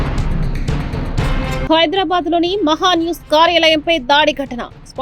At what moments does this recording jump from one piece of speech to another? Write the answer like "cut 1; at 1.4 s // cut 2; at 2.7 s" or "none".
none